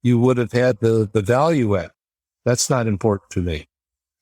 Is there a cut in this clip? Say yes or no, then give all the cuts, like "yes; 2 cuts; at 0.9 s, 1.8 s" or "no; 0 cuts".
yes; 1 cut; at 1.9 s